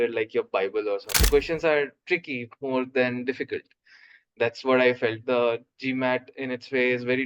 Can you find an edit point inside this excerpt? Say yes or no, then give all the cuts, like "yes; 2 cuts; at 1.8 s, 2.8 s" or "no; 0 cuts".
yes; 1 cut; at 1.2 s